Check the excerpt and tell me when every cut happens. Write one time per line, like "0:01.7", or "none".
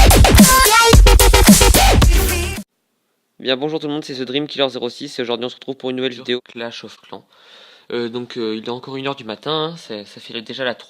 0:01.9